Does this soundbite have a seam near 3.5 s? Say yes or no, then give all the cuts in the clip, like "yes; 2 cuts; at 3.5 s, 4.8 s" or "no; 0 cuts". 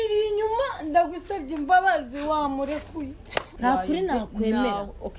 yes; 1 cut; at 3.5 s